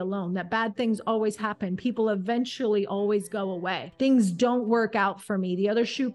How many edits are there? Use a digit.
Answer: 1